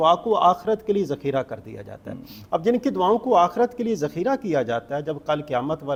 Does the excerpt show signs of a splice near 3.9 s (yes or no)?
no